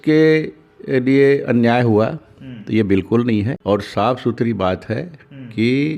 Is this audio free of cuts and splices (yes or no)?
yes